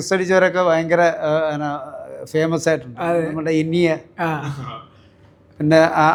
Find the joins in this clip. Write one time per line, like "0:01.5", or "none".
none